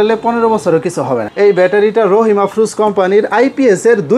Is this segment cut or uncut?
cut